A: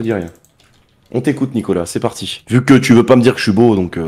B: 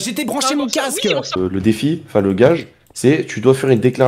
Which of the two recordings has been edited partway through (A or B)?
B